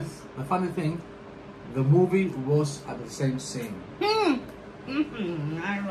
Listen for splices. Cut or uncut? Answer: uncut